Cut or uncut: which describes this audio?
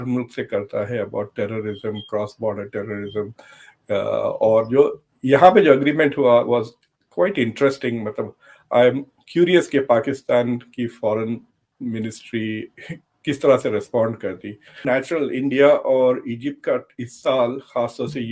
cut